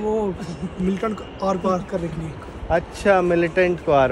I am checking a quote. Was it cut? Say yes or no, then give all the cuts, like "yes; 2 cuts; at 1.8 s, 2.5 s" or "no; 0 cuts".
no; 0 cuts